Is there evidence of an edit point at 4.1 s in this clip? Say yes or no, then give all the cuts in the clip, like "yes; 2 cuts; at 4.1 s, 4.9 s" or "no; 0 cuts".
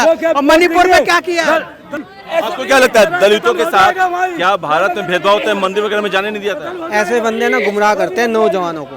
no; 1 cut; at 1.8 s